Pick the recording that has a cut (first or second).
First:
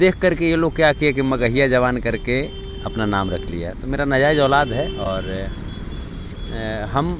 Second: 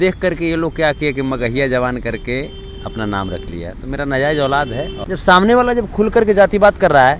second